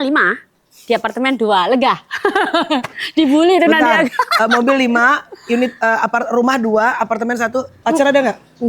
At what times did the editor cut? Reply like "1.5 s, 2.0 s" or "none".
7.8 s